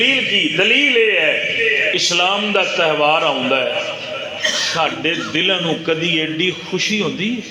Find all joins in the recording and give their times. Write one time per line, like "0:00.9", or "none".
none